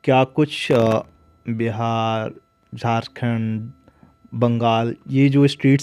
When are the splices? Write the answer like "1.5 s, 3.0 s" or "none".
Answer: none